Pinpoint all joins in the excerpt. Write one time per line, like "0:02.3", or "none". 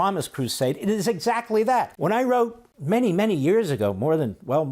0:01.9
0:02.7